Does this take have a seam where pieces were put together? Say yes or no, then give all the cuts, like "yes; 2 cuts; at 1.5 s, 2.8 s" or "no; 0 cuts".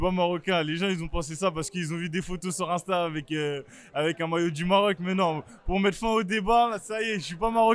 no; 0 cuts